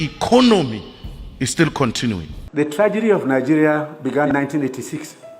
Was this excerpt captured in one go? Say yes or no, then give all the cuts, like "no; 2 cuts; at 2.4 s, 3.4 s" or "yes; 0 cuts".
no; 1 cut; at 2.3 s